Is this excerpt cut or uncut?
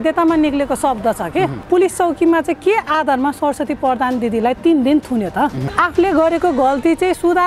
cut